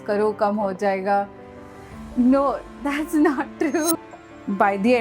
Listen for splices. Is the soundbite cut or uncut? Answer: cut